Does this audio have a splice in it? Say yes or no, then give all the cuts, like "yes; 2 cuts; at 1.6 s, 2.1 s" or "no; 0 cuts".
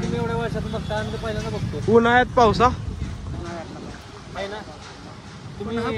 no; 0 cuts